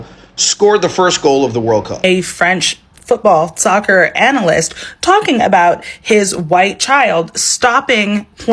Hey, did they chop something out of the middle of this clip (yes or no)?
yes